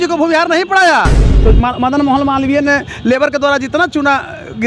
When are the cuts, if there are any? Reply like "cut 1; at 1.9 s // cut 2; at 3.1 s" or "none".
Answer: cut 1; at 1.3 s